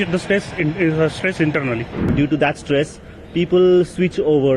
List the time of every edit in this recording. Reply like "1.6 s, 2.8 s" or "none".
2.1 s